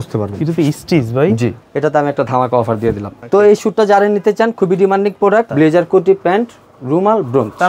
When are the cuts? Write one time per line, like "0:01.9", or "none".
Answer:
0:01.6
0:03.1
0:05.5